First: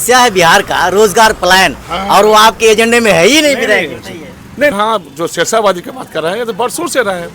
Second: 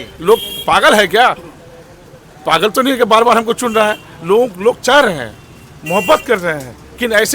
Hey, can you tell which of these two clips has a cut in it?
first; 1 cut; at 4.7 s

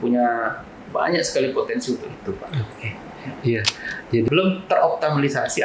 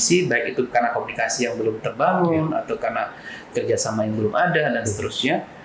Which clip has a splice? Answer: first; 1 cut; at 4.3 s

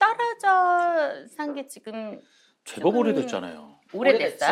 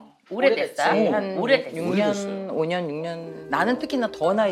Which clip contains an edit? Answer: second; 1 cut; at 3.3 s

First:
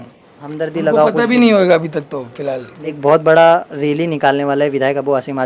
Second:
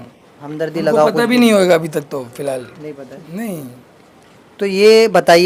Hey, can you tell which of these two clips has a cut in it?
first; 1 cut; at 2.8 s

